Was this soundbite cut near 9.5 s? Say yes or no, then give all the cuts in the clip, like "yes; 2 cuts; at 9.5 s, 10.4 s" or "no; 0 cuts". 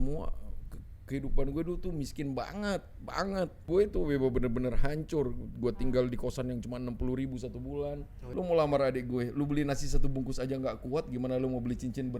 no; 2 cuts; at 3.6 s, 8.1 s